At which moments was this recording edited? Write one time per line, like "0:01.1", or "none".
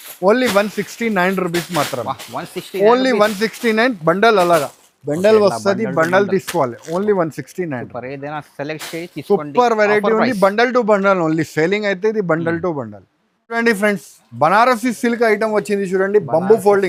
none